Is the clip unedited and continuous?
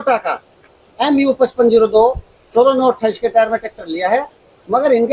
yes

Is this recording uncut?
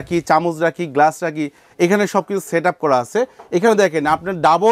yes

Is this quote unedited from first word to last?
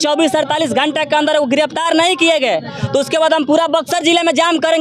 yes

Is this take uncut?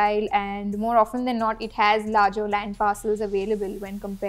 yes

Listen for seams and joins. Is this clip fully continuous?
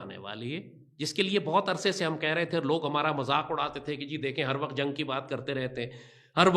yes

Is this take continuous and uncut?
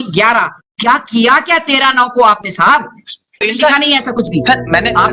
no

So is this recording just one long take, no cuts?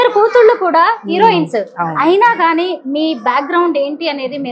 yes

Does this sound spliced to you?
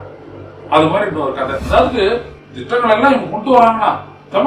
yes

